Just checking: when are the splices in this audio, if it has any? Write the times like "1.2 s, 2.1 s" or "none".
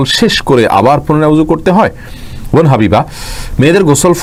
none